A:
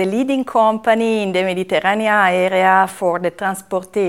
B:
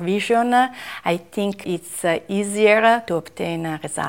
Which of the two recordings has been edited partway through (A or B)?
B